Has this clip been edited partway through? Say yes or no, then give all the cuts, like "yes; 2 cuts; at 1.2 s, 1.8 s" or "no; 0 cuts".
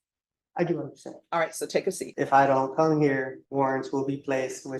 yes; 2 cuts; at 2.1 s, 3.4 s